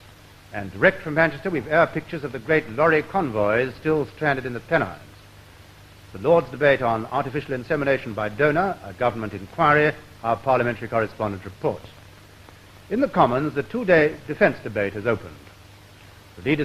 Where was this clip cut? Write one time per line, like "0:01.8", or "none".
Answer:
0:05.2